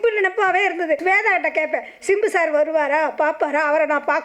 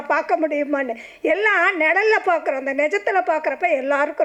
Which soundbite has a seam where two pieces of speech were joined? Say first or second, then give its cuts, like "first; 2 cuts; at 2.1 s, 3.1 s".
first; 1 cut; at 1.0 s